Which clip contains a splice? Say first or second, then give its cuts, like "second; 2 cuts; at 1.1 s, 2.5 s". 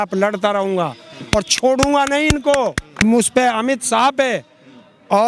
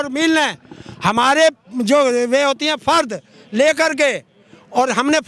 first; 1 cut; at 3.0 s